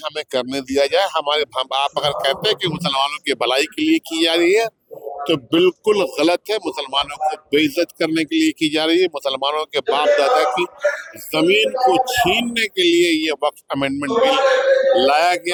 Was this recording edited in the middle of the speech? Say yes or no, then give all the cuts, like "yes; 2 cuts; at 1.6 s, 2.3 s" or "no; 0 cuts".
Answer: no; 0 cuts